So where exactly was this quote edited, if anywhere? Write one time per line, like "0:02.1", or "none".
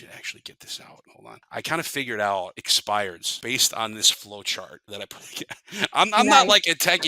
0:01.1
0:02.7
0:03.3
0:04.8